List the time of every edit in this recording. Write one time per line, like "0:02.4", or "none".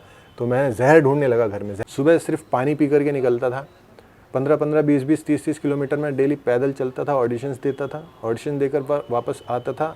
0:01.7